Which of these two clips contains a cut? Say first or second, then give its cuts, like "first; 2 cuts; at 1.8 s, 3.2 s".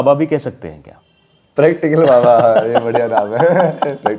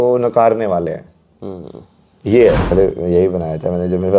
second; 1 cut; at 2.6 s